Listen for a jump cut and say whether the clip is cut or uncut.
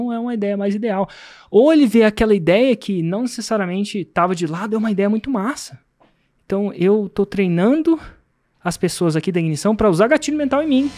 uncut